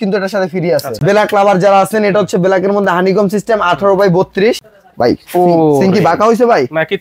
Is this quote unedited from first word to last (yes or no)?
no